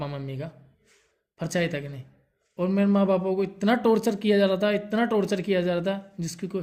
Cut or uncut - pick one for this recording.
uncut